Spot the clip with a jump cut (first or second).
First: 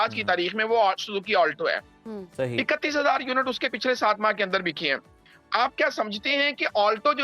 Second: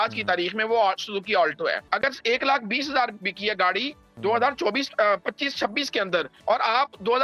second